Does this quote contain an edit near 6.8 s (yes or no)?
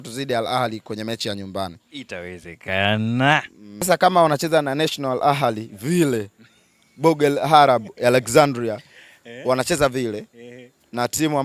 no